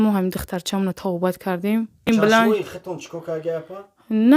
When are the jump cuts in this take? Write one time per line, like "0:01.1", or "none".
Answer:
0:02.1